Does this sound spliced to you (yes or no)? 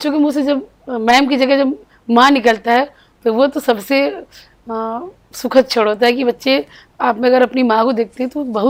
no